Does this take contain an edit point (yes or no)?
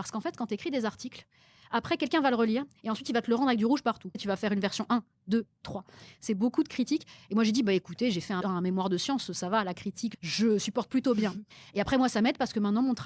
yes